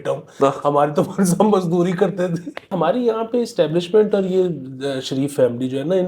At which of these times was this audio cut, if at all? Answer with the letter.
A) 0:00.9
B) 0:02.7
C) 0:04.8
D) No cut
B